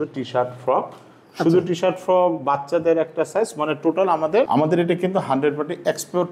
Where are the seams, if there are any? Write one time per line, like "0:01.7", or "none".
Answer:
0:04.5